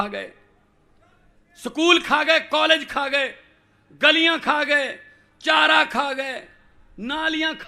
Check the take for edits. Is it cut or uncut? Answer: uncut